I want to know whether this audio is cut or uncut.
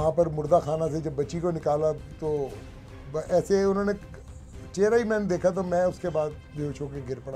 uncut